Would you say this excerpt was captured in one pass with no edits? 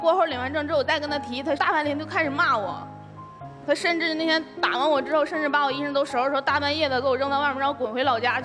yes; 0 cuts

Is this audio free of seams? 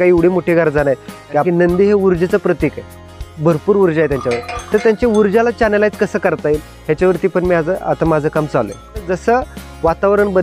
no; 2 cuts; at 1.4 s, 9.1 s

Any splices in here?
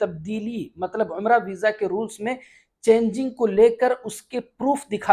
no; 0 cuts

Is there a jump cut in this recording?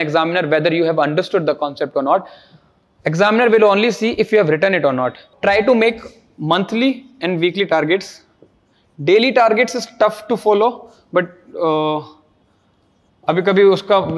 yes; 1 cut; at 5.3 s

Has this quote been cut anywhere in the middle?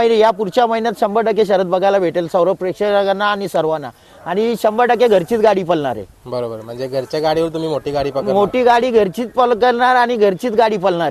no; 0 cuts

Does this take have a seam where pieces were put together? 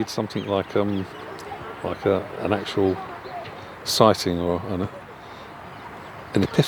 no; 0 cuts

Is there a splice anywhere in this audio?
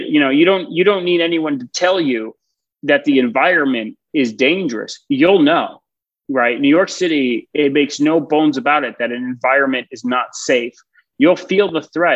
no; 0 cuts

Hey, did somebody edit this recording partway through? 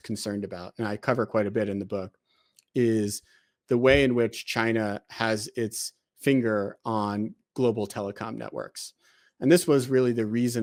no; 0 cuts

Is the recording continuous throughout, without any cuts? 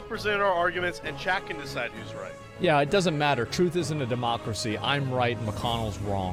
yes; 0 cuts

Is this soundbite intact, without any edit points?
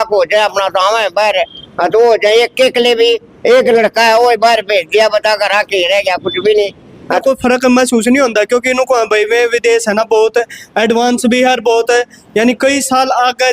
no; 1 cut; at 7.2 s

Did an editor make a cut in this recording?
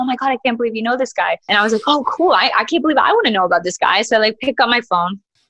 yes; 1 cut; at 1.4 s

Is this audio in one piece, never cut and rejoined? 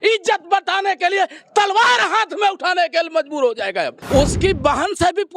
no; 1 cut; at 4.0 s

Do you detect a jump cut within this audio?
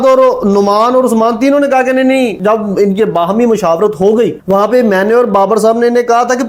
no; 0 cuts

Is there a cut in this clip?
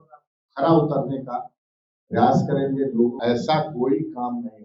yes; 1 cut; at 3.2 s

